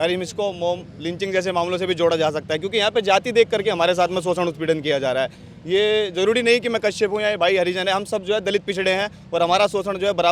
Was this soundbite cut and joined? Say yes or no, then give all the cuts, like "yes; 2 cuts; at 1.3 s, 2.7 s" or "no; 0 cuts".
no; 0 cuts